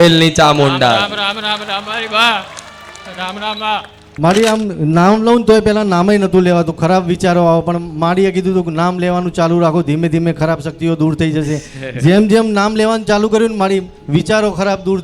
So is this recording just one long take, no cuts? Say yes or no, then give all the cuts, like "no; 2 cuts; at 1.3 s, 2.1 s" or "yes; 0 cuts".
no; 1 cut; at 4.0 s